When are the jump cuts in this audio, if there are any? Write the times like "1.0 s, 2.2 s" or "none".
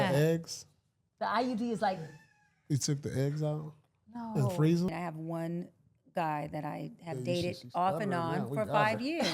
4.9 s